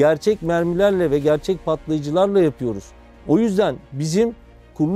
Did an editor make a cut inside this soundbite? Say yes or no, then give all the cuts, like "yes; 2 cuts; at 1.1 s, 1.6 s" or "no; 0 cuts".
no; 0 cuts